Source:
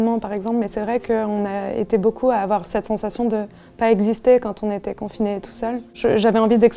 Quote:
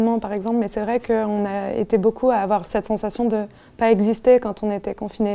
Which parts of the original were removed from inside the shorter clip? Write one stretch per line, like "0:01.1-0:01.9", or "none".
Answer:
none